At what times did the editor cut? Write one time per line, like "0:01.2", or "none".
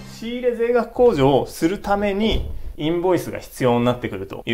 none